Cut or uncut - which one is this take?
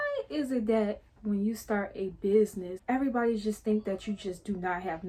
uncut